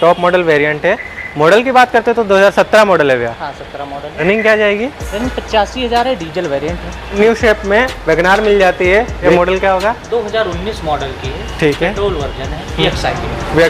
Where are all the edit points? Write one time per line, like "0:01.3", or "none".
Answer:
0:04.1
0:07.1
0:09.2
0:12.8